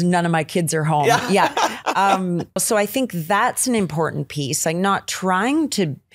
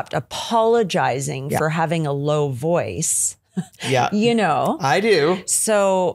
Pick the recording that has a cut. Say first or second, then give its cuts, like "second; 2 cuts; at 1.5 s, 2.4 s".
first; 1 cut; at 2.6 s